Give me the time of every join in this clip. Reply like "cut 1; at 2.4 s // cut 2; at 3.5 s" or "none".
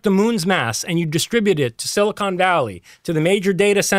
none